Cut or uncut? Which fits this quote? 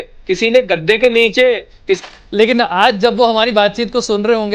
cut